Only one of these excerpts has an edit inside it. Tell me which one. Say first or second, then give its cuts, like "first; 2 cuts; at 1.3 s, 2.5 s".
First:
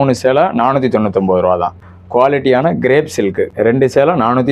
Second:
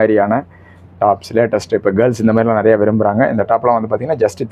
first; 2 cuts; at 1.8 s, 3.5 s